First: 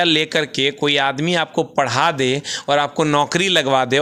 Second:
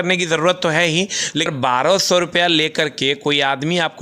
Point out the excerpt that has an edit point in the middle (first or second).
second